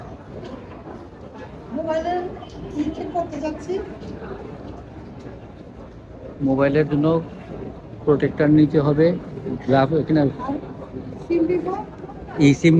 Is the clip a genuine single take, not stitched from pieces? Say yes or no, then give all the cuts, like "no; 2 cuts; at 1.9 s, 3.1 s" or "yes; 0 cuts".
yes; 0 cuts